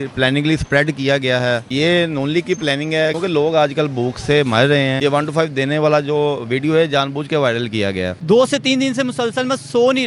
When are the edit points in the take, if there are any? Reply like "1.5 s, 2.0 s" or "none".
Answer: 3.1 s, 5.0 s, 8.1 s